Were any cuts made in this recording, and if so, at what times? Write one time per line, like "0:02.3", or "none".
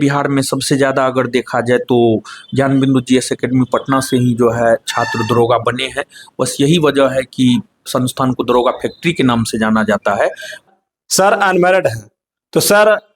0:10.6